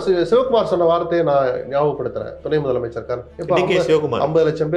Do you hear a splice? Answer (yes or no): yes